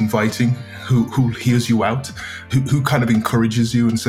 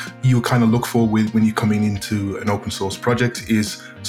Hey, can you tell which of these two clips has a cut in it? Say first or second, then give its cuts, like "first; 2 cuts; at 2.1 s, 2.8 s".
first; 1 cut; at 2.5 s